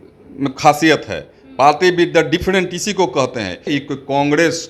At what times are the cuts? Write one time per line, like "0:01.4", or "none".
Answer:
0:03.7